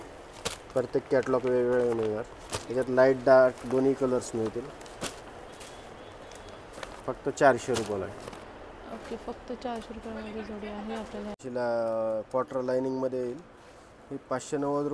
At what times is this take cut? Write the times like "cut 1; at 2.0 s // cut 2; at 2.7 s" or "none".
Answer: cut 1; at 11.4 s